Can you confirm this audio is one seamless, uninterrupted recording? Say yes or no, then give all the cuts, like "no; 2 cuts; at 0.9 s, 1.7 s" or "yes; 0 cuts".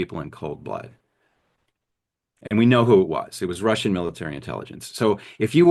yes; 0 cuts